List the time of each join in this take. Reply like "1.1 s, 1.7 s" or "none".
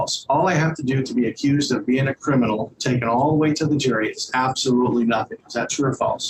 none